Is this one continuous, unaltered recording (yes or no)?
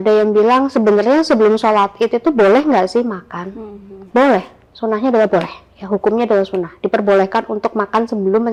yes